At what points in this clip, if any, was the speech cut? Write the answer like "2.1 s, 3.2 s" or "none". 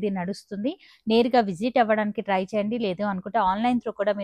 none